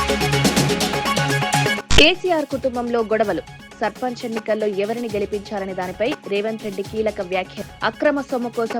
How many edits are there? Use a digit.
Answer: 0